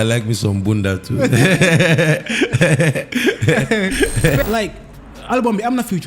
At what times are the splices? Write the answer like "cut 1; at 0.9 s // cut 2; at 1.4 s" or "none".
cut 1; at 4.3 s